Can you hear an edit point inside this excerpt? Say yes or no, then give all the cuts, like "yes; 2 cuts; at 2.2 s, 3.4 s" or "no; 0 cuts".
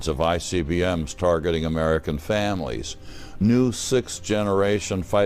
no; 0 cuts